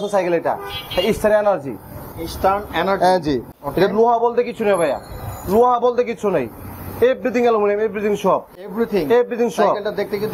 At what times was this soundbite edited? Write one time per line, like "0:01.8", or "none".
none